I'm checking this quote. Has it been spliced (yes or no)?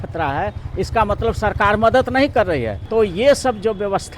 yes